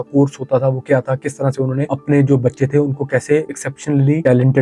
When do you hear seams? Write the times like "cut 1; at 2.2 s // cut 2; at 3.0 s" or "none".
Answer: cut 1; at 3.6 s